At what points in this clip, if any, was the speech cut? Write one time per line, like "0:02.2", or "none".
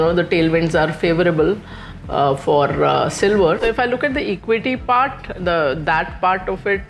0:03.6